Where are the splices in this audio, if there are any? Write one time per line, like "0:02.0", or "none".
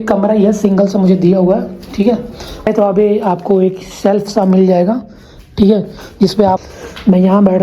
0:02.6
0:06.6